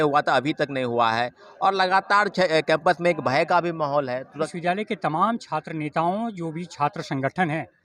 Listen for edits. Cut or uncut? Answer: cut